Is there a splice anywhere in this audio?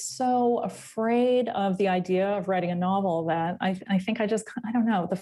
no; 0 cuts

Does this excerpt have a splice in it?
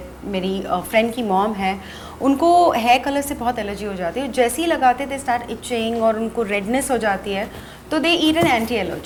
no; 0 cuts

